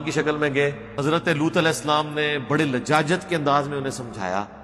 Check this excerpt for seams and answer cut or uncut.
cut